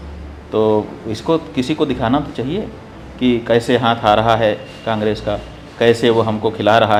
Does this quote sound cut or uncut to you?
uncut